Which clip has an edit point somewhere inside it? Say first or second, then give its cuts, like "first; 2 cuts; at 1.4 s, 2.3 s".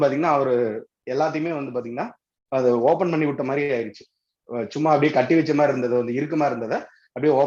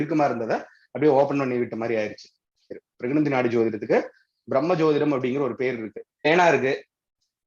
second; 2 cuts; at 2.6 s, 6.3 s